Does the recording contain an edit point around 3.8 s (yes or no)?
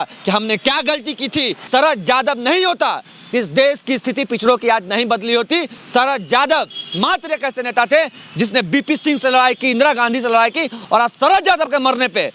no